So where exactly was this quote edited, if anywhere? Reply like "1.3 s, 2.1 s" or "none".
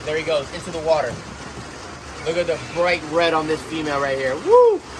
none